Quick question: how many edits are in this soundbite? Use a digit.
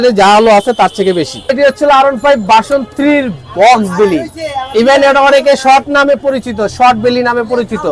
1